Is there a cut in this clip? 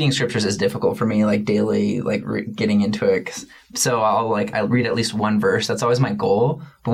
no; 0 cuts

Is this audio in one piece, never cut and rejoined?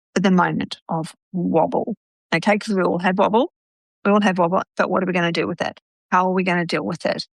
yes; 0 cuts

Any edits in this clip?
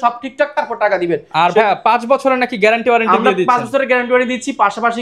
no; 0 cuts

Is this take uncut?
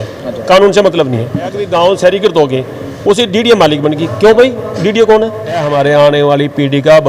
no; 2 cuts; at 1.6 s, 5.7 s

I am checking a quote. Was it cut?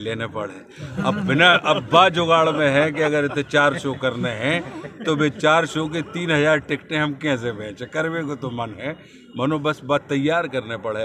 no; 0 cuts

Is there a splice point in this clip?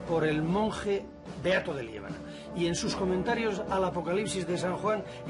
no; 0 cuts

